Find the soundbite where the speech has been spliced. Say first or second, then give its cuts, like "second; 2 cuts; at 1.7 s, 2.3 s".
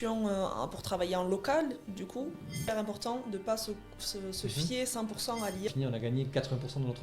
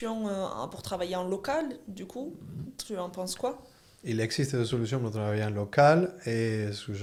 first; 2 cuts; at 2.7 s, 5.7 s